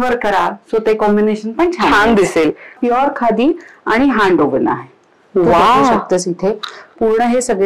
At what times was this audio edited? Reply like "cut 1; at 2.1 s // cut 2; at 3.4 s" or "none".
cut 1; at 2.8 s